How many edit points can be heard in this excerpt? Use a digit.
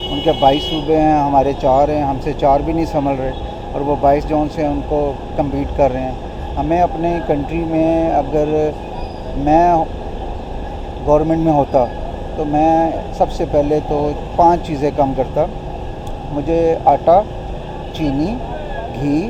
0